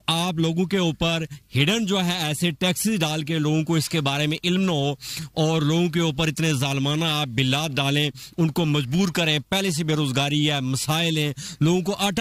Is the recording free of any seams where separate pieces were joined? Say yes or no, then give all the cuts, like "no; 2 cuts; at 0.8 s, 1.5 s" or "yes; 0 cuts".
yes; 0 cuts